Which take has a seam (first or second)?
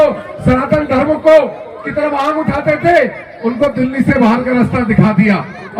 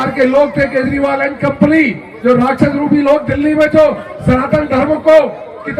second